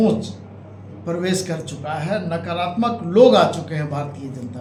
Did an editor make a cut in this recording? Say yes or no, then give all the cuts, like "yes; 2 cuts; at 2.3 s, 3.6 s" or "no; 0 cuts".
no; 0 cuts